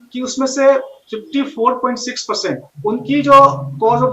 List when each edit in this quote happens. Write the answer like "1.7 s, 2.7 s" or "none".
2.7 s